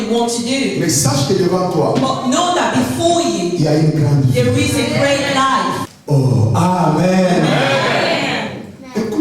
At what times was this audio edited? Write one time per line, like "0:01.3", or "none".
0:05.9